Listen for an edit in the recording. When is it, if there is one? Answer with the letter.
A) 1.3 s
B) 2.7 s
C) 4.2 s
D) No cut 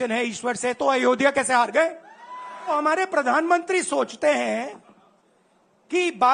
B